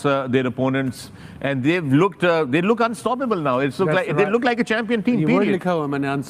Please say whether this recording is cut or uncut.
uncut